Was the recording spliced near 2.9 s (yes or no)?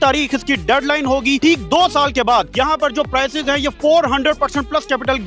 no